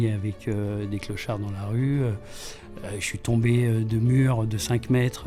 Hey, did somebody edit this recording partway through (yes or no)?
no